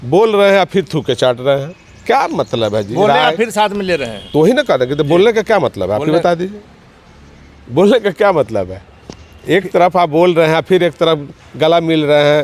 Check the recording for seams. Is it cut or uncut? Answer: uncut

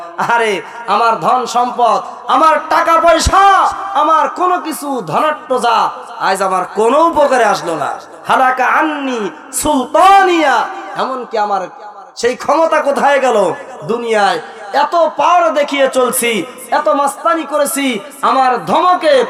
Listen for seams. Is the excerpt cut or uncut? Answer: uncut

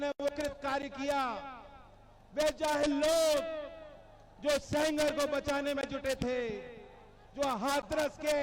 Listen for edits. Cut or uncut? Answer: uncut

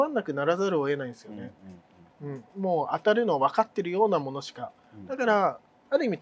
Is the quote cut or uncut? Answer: uncut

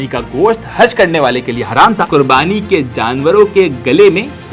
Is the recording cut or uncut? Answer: cut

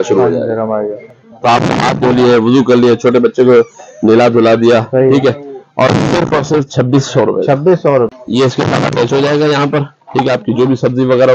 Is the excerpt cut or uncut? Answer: cut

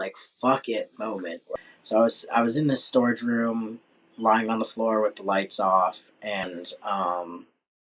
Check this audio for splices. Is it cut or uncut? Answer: cut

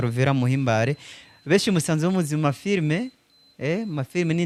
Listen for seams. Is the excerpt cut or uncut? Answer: uncut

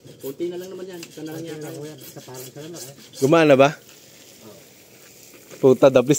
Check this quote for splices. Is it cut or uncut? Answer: uncut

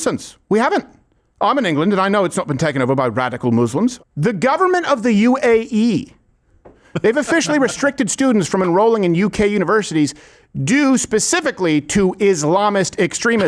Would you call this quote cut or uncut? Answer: cut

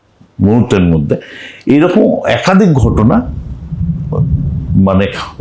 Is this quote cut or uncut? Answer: uncut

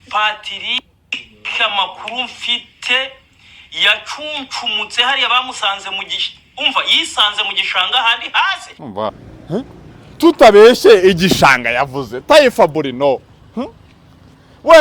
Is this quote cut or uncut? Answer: cut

